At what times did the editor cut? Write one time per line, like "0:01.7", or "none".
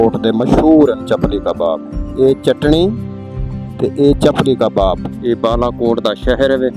0:05.1